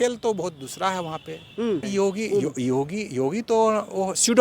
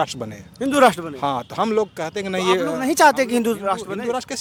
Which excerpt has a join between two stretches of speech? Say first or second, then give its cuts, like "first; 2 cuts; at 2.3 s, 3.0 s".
first; 1 cut; at 1.9 s